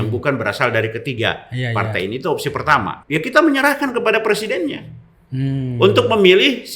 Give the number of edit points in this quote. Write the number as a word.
one